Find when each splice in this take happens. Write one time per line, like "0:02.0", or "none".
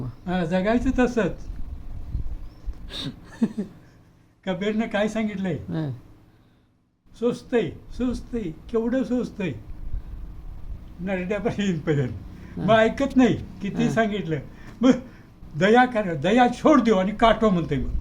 0:02.8